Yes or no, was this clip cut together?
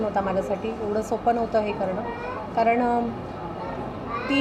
no